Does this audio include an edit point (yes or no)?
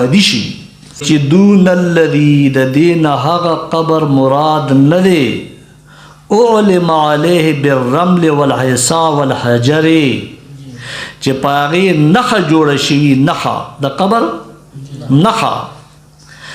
yes